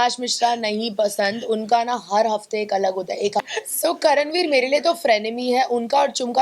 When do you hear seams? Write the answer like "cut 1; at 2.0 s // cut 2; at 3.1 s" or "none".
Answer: cut 1; at 3.5 s